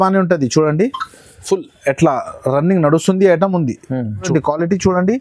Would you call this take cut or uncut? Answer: cut